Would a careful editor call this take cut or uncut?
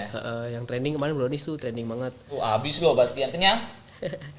uncut